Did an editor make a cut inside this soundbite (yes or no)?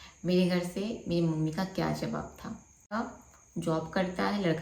yes